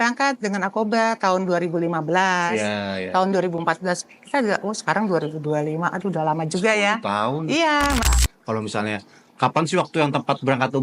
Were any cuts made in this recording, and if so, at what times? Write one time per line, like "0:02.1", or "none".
0:08.1